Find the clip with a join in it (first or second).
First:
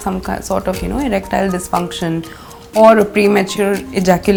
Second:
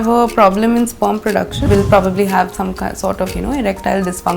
second